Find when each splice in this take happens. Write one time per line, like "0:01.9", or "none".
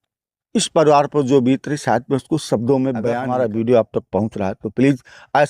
0:03.2